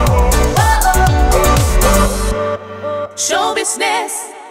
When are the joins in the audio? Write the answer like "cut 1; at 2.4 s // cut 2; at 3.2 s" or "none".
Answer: none